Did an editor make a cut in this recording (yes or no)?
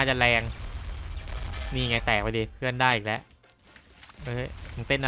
no